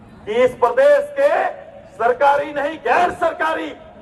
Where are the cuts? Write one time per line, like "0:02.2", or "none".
none